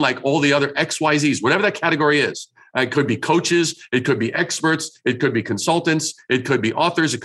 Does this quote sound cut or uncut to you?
uncut